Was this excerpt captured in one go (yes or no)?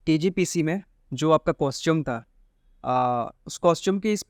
yes